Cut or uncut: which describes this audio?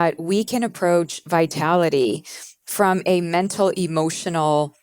uncut